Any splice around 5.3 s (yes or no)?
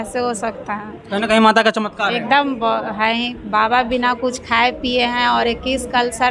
no